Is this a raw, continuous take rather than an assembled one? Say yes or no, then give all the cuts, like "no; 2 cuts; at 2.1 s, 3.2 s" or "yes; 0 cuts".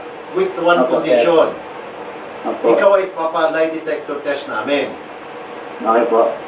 yes; 0 cuts